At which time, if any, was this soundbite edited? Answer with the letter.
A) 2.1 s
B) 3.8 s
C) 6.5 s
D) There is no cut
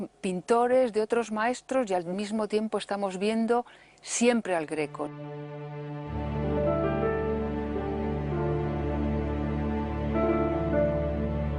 D